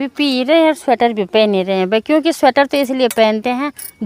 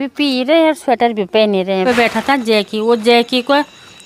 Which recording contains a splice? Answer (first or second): second